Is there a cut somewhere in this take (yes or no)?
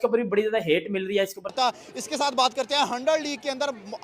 yes